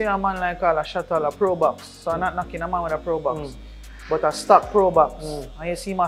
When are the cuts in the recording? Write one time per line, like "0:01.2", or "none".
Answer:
none